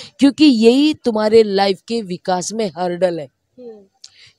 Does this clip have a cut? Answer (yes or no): no